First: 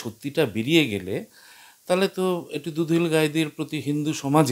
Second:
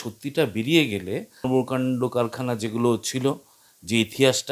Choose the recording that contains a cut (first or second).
second